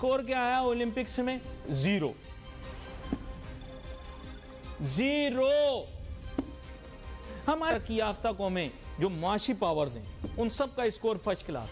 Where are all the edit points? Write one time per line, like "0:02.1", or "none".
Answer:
0:07.7